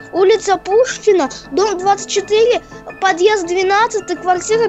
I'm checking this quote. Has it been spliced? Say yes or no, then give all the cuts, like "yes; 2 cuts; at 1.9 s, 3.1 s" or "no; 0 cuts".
no; 0 cuts